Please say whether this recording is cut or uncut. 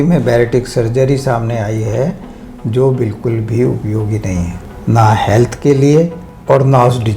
cut